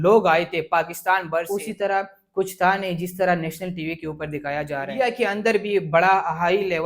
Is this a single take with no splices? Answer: no; 2 cuts; at 1.5 s, 4.9 s

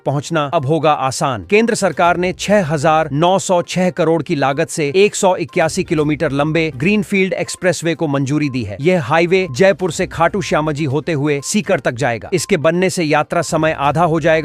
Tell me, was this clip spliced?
no; 0 cuts

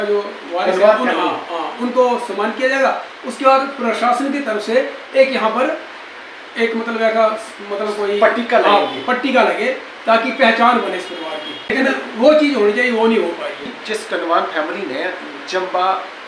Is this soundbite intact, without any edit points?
no; 2 cuts; at 11.7 s, 13.7 s

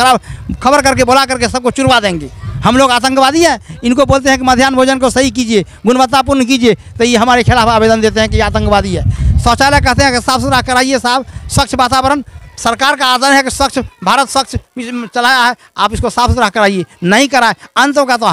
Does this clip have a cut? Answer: no; 0 cuts

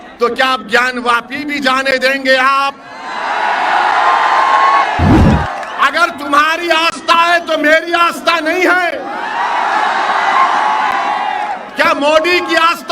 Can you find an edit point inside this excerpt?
yes; 1 cut; at 5.2 s

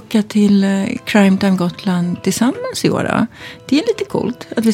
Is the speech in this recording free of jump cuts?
yes; 0 cuts

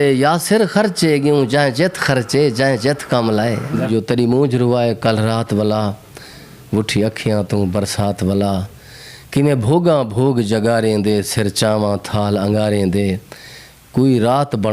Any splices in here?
yes; 1 cut; at 3.9 s

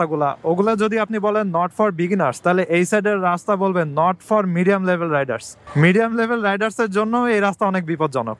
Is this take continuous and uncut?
yes; 0 cuts

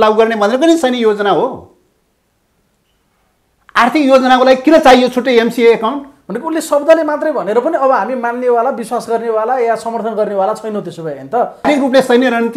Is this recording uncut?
no; 1 cut; at 11.7 s

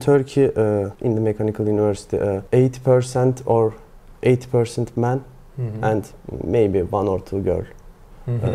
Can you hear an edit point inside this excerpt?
yes; 2 cuts; at 0.9 s, 2.4 s

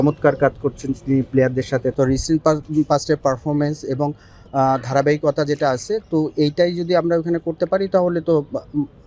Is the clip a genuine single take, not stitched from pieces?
no; 1 cut; at 1.9 s

